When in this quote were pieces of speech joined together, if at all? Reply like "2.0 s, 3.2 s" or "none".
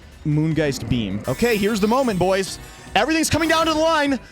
1.2 s